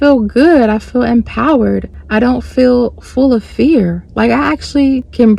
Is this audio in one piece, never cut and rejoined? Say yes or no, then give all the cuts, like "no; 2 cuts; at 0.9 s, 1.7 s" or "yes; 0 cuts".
yes; 0 cuts